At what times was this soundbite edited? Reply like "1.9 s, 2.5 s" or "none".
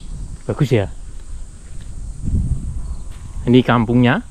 2.2 s